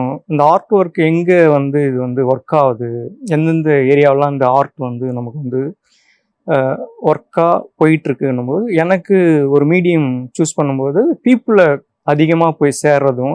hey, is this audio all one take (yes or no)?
yes